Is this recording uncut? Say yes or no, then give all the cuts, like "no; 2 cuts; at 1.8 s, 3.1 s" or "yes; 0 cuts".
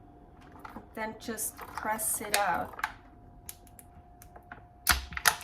no; 1 cut; at 3.9 s